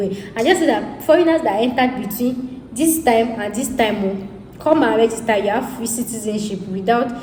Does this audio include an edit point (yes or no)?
no